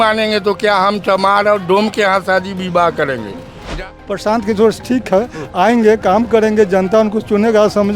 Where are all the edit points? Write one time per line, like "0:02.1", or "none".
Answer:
0:03.8